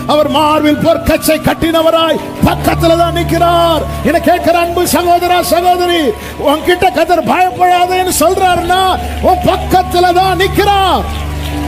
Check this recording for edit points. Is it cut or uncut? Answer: uncut